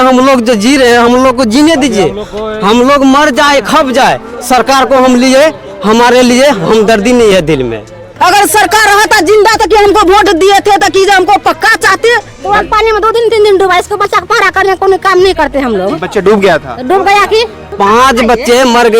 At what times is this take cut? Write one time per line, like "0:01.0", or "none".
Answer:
0:08.1
0:12.3
0:17.6